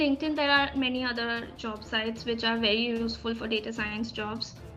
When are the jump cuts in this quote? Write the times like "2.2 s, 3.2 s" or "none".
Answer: none